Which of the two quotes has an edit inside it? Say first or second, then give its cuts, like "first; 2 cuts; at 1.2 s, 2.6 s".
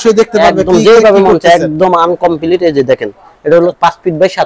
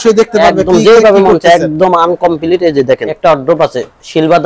second; 1 cut; at 3.1 s